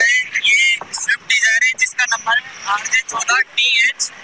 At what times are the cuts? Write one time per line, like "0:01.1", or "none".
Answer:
none

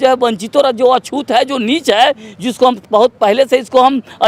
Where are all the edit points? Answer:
none

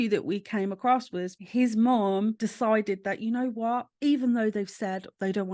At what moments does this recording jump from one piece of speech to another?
0:01.4
0:02.4
0:03.9

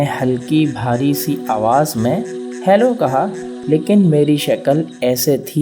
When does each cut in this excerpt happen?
0:03.5

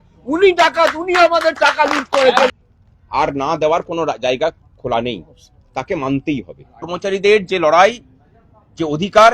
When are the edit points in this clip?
0:02.5
0:06.9

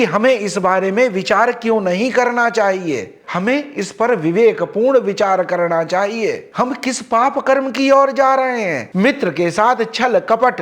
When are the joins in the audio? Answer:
0:06.4
0:08.8

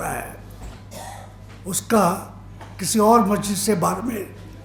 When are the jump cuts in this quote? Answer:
none

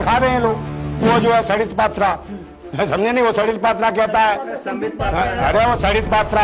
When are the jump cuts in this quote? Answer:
0:01.0

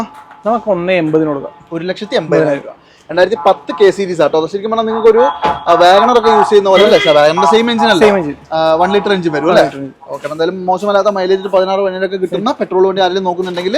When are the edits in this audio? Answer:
none

